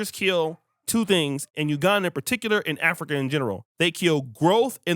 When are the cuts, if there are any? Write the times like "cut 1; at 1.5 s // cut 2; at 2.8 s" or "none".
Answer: cut 1; at 1.5 s // cut 2; at 3.7 s